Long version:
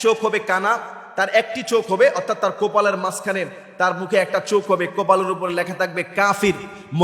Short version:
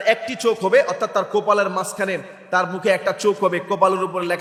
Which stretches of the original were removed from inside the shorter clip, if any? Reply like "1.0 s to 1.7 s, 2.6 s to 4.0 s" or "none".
none

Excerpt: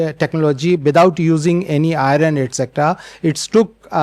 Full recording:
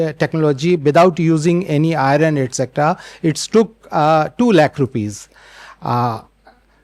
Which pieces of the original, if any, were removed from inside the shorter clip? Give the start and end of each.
none

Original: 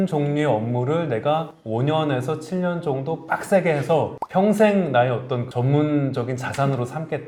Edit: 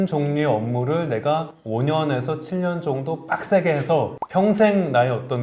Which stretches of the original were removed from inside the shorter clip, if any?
none

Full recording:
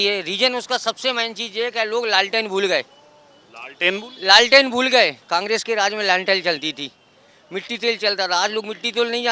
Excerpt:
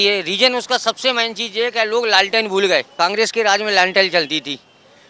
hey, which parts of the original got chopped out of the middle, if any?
2.9 s to 5.2 s

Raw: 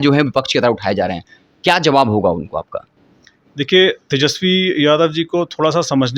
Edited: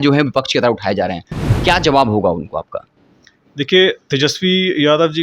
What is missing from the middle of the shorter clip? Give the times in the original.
none

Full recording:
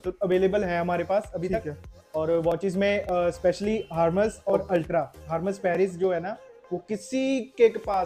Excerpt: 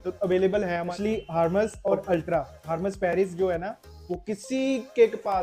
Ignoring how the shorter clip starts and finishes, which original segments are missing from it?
0.9 s to 3.6 s

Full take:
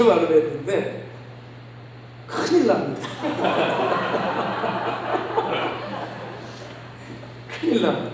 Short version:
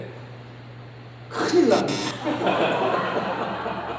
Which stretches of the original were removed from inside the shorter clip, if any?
none

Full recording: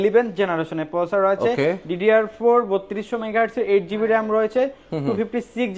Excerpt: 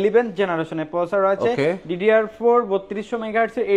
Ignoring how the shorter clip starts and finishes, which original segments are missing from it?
none

